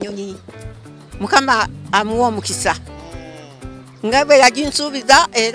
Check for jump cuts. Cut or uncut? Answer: uncut